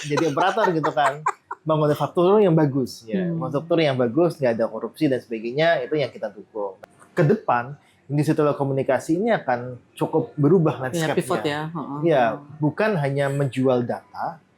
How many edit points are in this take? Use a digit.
1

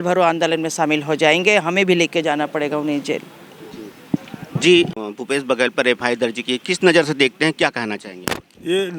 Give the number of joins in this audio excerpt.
0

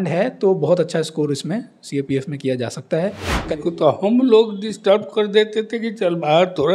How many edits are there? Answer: 1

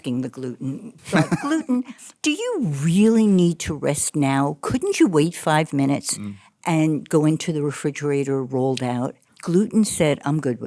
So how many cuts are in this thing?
1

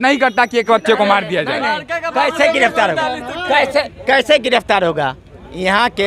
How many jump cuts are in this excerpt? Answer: 0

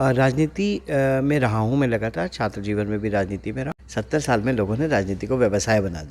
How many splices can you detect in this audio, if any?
1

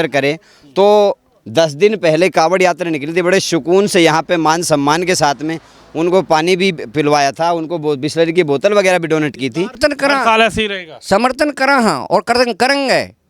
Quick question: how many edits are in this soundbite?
1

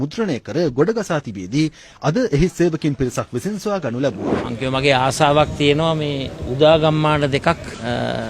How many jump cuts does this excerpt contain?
1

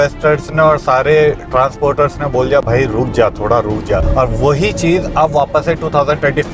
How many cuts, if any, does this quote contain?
1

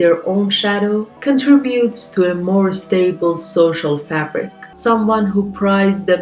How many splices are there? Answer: 1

